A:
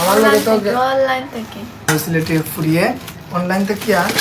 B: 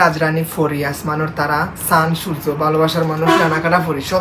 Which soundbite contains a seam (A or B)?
A